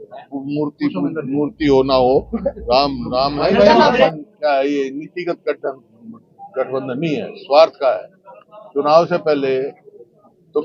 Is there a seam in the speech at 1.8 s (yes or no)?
no